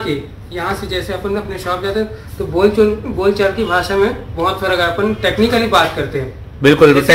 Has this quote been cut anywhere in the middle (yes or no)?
no